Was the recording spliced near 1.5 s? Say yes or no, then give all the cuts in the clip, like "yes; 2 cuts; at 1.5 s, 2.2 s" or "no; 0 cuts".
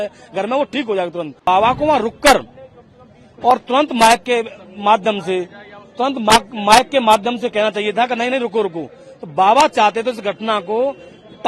yes; 1 cut; at 1.5 s